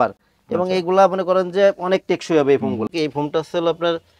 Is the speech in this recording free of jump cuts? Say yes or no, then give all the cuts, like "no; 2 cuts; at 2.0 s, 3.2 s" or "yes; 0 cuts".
no; 1 cut; at 2.9 s